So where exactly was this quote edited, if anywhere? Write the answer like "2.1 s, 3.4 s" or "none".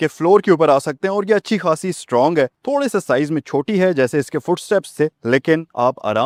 none